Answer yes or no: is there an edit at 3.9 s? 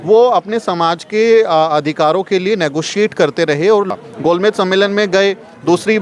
yes